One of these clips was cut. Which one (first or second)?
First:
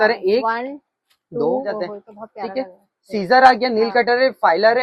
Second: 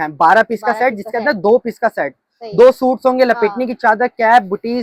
first